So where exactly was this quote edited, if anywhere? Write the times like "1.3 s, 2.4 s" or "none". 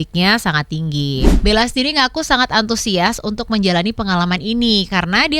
1.3 s